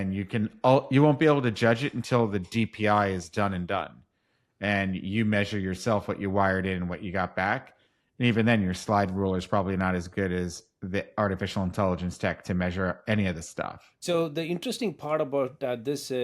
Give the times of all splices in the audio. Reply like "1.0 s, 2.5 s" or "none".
14.0 s

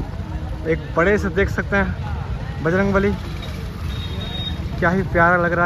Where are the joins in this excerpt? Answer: none

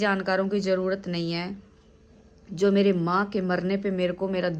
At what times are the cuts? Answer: none

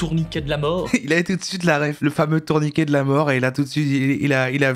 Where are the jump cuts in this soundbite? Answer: 0.9 s, 1.9 s

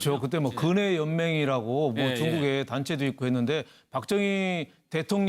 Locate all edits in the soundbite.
2.1 s

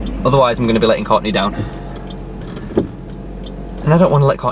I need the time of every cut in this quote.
none

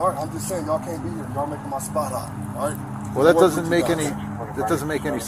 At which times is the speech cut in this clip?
none

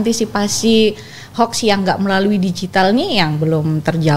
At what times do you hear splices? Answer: none

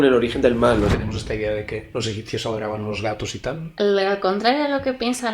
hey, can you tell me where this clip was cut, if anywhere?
1.0 s, 1.9 s, 3.7 s

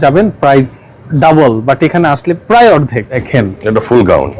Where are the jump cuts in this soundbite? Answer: 3.2 s

